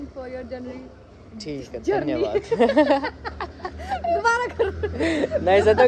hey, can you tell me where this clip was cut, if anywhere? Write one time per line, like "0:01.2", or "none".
none